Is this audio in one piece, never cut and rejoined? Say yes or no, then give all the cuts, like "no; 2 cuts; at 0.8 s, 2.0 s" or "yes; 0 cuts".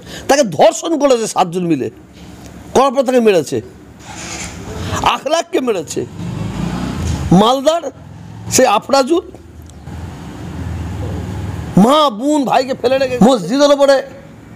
no; 1 cut; at 13.1 s